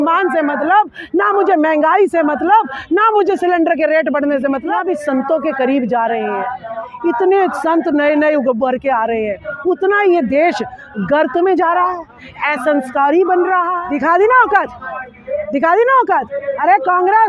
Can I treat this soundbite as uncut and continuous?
no; 2 cuts; at 4.7 s, 13.8 s

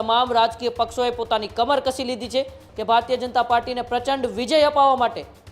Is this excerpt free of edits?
no; 1 cut; at 2.7 s

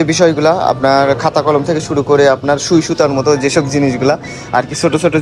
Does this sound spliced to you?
no; 0 cuts

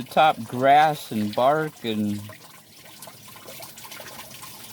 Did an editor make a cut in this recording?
no; 0 cuts

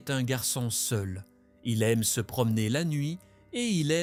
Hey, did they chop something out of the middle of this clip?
no; 0 cuts

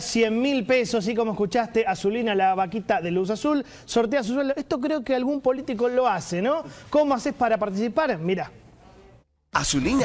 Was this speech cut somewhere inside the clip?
no; 0 cuts

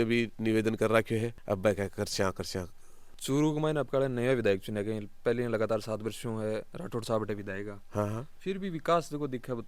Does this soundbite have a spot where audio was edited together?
no; 0 cuts

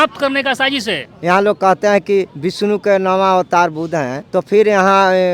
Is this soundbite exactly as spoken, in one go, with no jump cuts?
no; 3 cuts; at 1.0 s, 2.4 s, 4.2 s

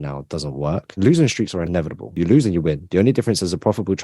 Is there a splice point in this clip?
yes; 2 cuts; at 1.0 s, 2.1 s

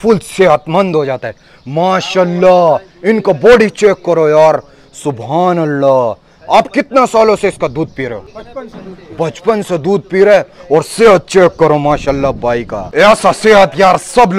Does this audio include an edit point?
no; 0 cuts

